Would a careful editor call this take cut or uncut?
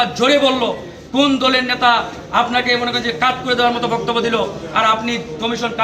uncut